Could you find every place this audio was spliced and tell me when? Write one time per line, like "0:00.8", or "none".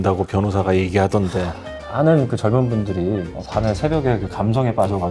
0:01.8